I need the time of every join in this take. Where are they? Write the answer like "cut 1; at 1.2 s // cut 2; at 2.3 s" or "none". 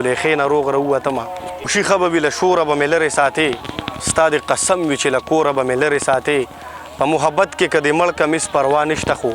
cut 1; at 1.7 s